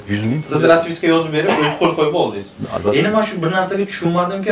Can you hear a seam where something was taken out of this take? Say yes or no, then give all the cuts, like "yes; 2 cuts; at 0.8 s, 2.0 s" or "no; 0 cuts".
no; 0 cuts